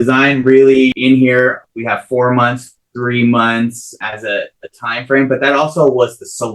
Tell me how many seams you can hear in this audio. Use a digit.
3